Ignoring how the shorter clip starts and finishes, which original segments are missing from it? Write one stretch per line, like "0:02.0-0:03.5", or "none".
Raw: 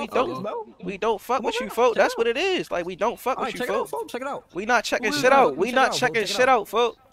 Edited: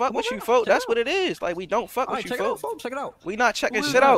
none